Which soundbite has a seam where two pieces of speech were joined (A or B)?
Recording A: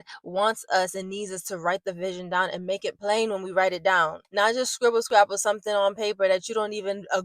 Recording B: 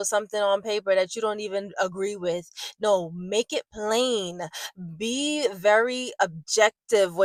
A